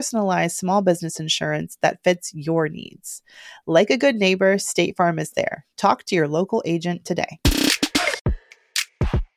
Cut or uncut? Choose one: cut